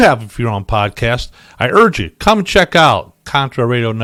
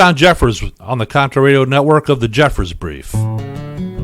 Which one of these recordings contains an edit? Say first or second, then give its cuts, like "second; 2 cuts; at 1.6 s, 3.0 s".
second; 1 cut; at 3.0 s